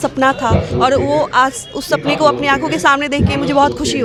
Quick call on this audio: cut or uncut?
uncut